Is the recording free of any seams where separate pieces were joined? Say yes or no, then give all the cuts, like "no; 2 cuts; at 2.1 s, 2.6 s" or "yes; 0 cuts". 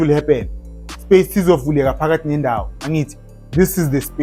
yes; 0 cuts